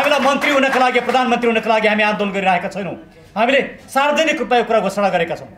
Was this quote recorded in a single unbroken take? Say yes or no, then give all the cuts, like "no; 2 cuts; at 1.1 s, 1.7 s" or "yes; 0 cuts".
yes; 0 cuts